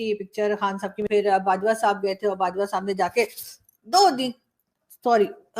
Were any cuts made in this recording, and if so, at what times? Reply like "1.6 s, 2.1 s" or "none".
1.1 s